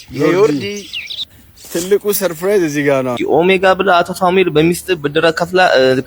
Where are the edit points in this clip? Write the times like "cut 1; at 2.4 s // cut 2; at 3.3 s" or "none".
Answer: cut 1; at 3.2 s